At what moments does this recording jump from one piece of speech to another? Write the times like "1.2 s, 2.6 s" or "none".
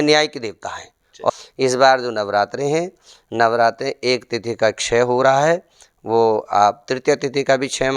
1.3 s